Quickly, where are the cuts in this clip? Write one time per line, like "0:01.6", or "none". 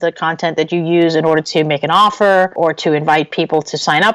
0:02.5